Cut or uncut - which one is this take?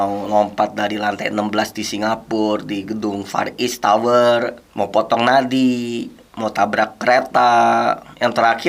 uncut